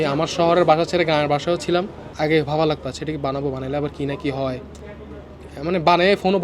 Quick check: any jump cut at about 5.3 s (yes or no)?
no